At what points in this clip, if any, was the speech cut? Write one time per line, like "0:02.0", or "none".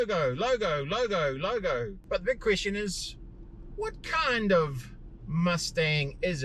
0:02.0